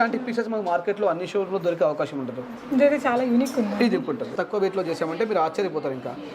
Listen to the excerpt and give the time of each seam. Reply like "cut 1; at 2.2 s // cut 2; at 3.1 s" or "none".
cut 1; at 4.4 s